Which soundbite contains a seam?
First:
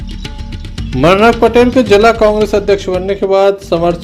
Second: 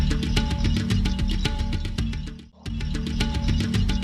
second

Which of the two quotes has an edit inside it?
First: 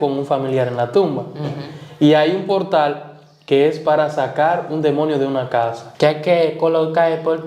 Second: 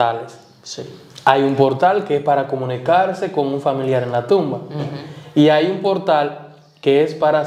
first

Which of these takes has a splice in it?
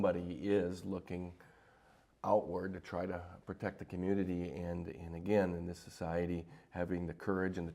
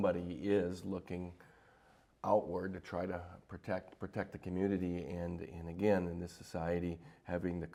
first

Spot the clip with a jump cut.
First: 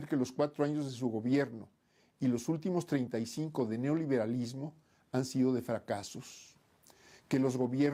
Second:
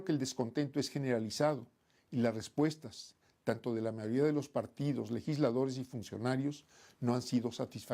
second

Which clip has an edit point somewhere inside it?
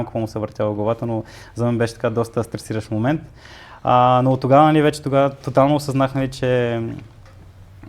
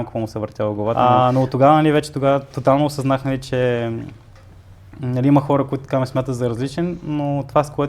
second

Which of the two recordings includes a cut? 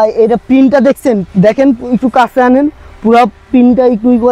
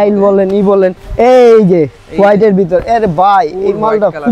second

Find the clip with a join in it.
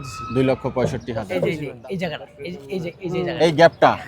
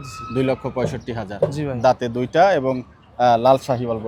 first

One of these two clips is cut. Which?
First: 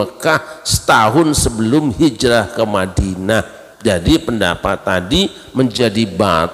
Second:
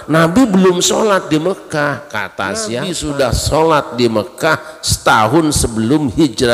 second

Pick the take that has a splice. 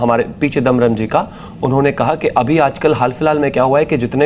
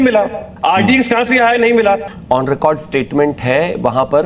second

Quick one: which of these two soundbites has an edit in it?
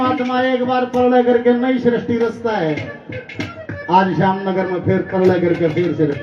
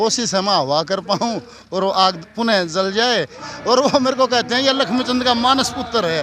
second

